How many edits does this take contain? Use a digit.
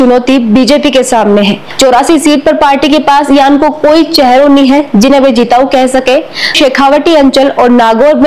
2